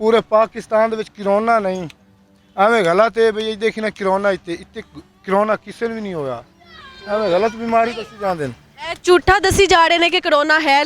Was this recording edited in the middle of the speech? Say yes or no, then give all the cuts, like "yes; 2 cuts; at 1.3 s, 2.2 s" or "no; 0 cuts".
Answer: no; 0 cuts